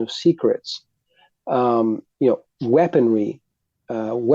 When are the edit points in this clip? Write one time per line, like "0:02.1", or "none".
none

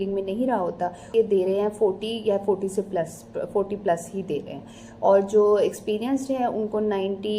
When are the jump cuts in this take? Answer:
0:01.1

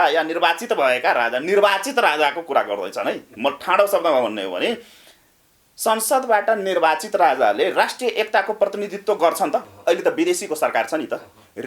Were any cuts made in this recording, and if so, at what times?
0:09.7

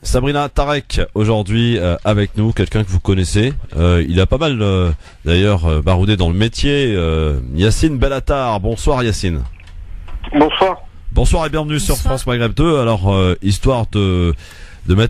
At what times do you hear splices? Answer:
0:11.3

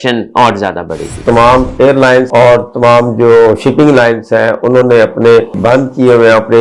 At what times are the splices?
0:01.2
0:05.5

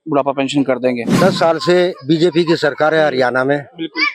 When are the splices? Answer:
0:01.1

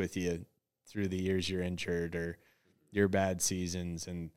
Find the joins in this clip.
none

